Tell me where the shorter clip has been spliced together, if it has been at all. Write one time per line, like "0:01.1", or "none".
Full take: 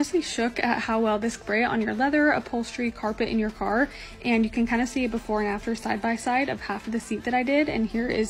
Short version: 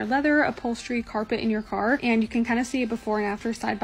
0:02.0